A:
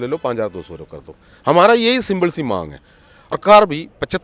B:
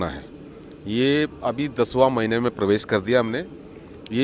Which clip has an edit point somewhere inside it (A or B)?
A